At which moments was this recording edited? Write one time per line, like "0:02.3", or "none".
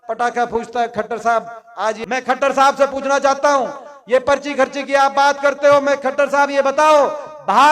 0:02.0